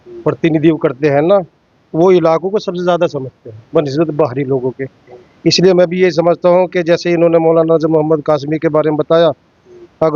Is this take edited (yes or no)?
no